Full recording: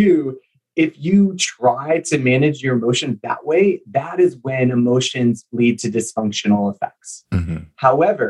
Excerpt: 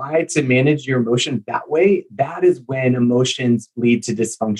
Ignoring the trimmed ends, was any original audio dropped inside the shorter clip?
no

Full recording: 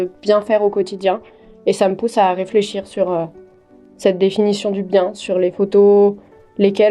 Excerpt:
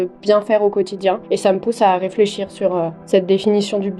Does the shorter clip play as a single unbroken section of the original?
no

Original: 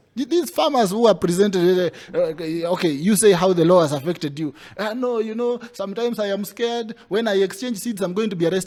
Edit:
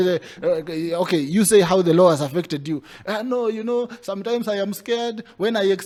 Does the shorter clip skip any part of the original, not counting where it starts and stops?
no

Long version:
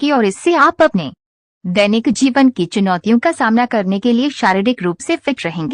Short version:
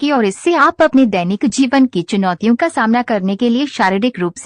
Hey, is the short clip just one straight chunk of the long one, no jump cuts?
no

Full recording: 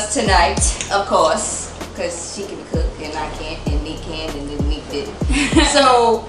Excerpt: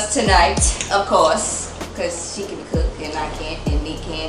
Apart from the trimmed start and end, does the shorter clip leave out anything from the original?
no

